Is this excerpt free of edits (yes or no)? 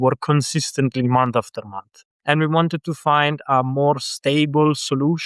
no